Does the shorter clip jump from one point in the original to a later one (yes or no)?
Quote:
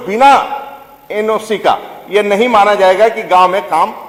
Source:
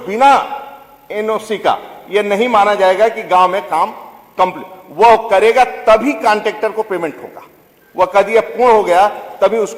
no